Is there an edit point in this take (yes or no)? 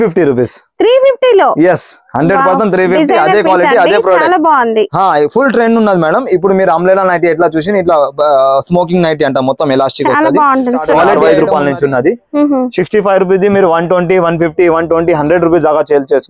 yes